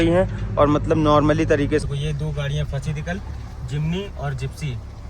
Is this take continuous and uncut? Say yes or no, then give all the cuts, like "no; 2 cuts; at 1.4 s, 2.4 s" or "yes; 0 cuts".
no; 1 cut; at 1.8 s